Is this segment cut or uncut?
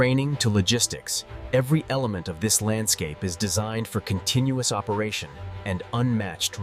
uncut